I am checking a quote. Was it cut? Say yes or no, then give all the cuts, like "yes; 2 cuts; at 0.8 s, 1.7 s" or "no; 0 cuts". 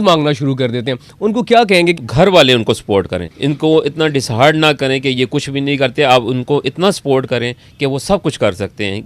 yes; 2 cuts; at 2.0 s, 3.2 s